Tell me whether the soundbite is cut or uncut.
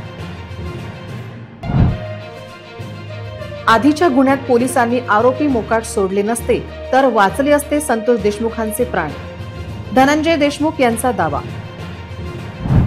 cut